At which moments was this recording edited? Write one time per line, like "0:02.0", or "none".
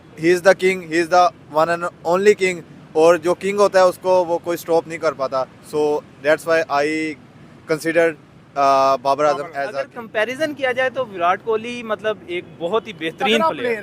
0:09.9